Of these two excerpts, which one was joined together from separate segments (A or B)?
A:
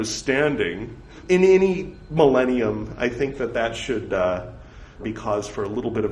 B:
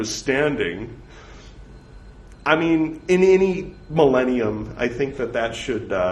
A